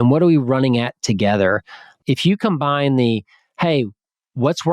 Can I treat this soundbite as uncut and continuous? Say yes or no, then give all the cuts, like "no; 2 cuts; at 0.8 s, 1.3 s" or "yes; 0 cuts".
no; 1 cut; at 1.9 s